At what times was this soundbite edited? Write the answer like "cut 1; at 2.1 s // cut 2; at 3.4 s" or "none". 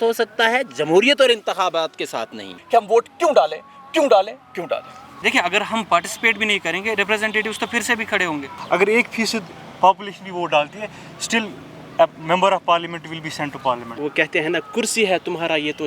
cut 1; at 2.5 s // cut 2; at 5.1 s // cut 3; at 8.5 s // cut 4; at 13.9 s